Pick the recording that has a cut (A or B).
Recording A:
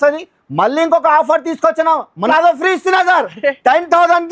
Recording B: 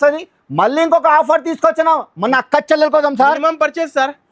A